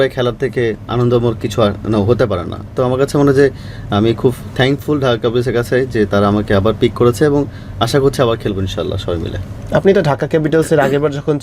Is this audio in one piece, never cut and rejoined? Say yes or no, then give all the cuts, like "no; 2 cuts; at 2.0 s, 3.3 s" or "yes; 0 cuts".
yes; 0 cuts